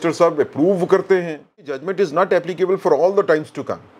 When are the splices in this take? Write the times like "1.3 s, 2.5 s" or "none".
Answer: 1.9 s

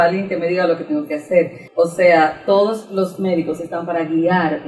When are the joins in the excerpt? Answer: 1.6 s

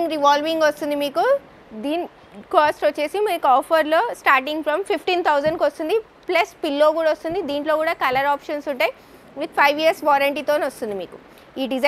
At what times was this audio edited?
none

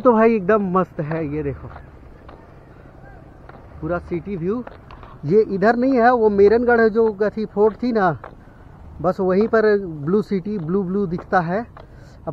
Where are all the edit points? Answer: none

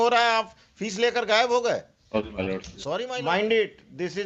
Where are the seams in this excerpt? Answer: 2.7 s

